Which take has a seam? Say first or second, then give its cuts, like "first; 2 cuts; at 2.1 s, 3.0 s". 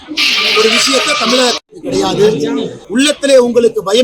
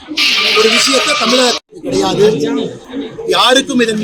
first; 1 cut; at 2.8 s